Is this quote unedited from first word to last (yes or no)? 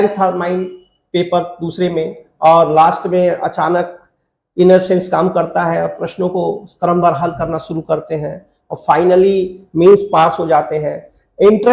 yes